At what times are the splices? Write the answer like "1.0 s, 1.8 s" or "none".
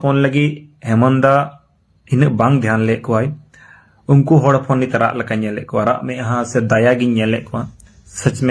none